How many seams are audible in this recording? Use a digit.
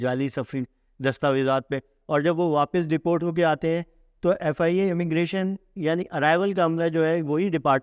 0